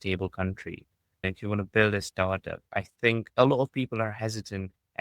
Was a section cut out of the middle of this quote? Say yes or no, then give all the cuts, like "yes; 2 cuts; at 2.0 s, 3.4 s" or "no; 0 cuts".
yes; 2 cuts; at 1.2 s, 3.3 s